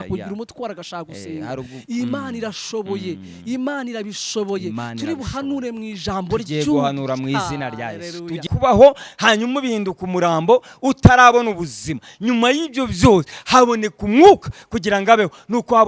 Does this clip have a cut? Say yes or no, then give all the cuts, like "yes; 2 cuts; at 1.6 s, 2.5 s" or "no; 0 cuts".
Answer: yes; 1 cut; at 8.5 s